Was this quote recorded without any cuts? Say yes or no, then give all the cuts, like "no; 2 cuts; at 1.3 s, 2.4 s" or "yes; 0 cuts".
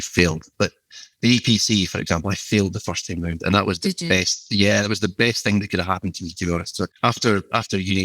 no; 1 cut; at 6.9 s